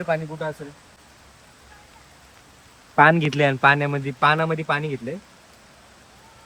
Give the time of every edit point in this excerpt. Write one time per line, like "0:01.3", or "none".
0:01.0